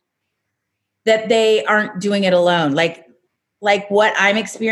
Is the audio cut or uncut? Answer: uncut